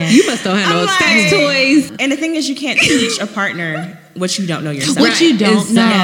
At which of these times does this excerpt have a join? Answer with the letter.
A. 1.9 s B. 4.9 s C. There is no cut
A